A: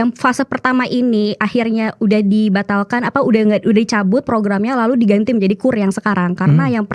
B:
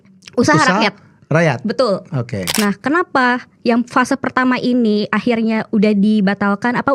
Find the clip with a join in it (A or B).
B